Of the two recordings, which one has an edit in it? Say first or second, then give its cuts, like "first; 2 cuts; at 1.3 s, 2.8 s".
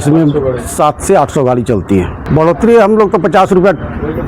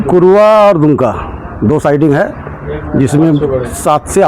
first; 1 cut; at 2.2 s